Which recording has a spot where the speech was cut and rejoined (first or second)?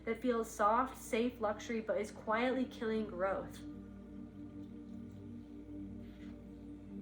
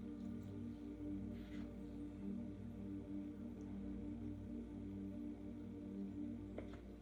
first